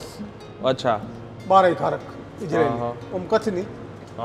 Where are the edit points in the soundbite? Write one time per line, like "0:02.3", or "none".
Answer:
none